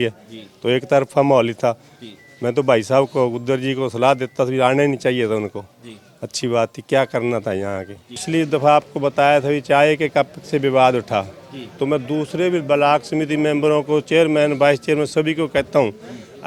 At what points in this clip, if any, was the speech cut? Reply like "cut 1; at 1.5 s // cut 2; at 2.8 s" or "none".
cut 1; at 8.2 s